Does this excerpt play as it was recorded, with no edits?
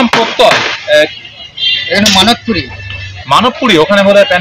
yes; 0 cuts

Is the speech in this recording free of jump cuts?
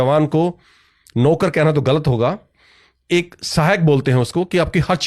yes; 0 cuts

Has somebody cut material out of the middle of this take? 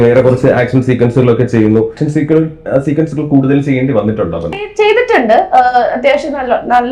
yes; 2 cuts; at 2.0 s, 4.7 s

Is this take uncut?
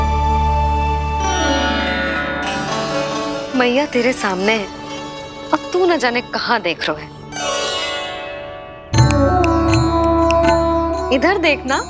yes; 0 cuts

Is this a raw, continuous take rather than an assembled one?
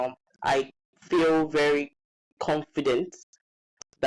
yes; 0 cuts

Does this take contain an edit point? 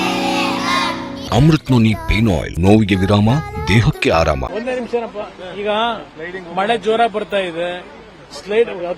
yes; 3 cuts; at 1.2 s, 2.5 s, 4.5 s

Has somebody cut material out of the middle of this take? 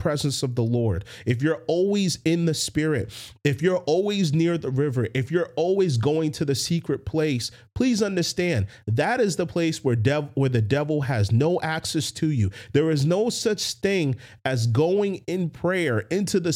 no; 0 cuts

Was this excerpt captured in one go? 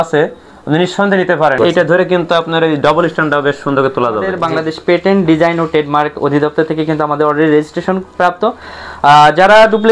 no; 2 cuts; at 1.6 s, 4.4 s

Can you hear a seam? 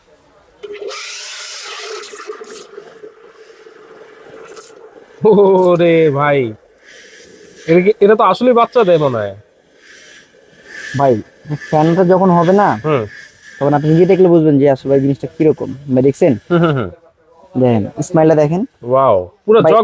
no; 0 cuts

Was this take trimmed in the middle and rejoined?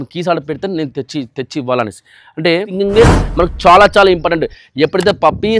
yes; 1 cut; at 2.7 s

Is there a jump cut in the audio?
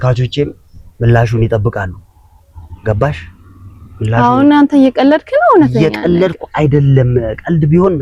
no; 0 cuts

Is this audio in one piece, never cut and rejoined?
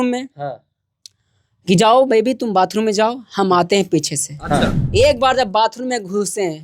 no; 1 cut; at 4.8 s

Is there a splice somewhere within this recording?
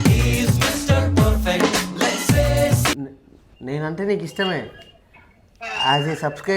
yes; 1 cut; at 3.0 s

